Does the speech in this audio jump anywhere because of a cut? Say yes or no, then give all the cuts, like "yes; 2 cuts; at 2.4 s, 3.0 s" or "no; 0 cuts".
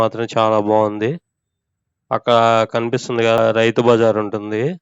yes; 1 cut; at 3.4 s